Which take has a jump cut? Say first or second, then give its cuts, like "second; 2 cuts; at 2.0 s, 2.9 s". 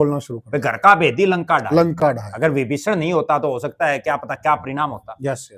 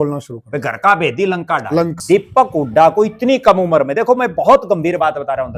second; 1 cut; at 1.9 s